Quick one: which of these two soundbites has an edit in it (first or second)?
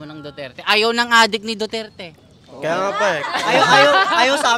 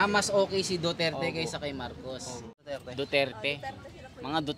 second